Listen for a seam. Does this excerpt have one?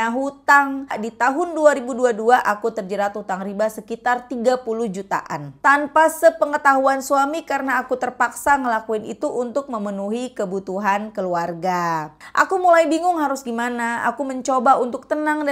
yes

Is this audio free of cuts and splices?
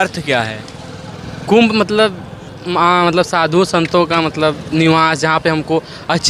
yes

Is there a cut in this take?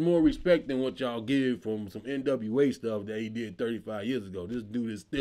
no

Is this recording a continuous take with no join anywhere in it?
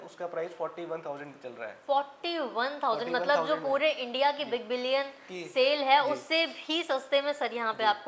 yes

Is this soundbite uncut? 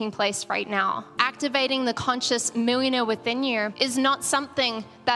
no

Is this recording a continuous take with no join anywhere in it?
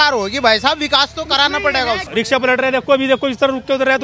no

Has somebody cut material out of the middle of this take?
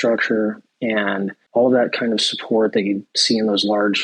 yes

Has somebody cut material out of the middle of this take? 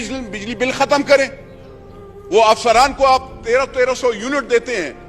no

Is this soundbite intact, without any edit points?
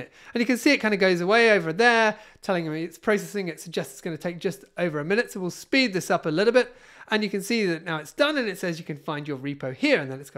yes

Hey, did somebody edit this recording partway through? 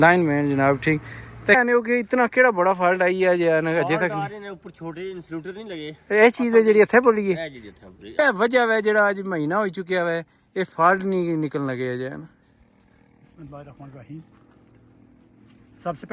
yes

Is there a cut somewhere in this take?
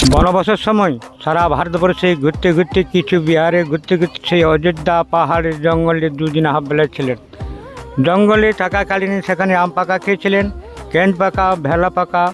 no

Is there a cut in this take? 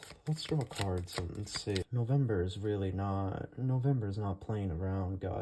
yes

